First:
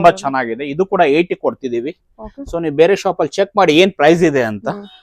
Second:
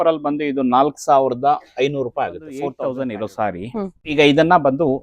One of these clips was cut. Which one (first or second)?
second